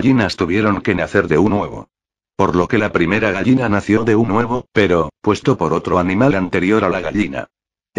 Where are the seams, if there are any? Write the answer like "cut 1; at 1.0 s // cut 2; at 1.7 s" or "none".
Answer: none